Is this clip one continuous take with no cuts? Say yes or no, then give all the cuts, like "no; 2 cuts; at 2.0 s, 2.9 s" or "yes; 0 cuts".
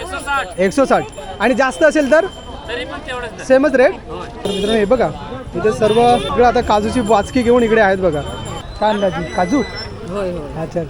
no; 2 cuts; at 4.5 s, 8.6 s